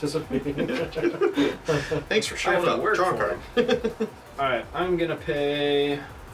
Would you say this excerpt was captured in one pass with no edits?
yes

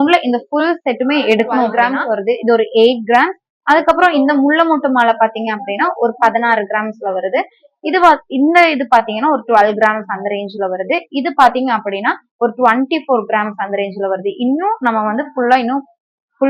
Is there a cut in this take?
yes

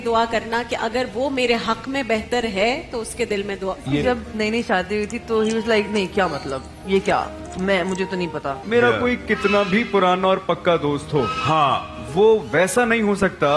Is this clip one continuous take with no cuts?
no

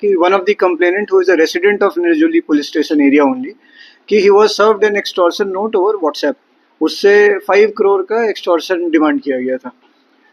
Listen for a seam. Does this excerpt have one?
no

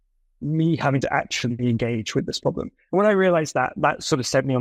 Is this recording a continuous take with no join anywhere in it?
yes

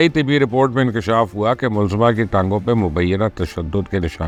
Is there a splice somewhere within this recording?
no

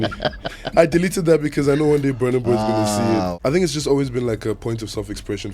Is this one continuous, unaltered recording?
no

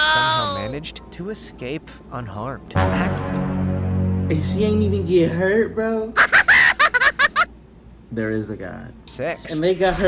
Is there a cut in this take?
no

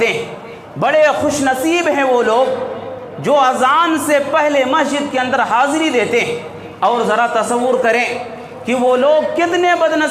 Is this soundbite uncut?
yes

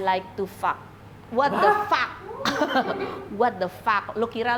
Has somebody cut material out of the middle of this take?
no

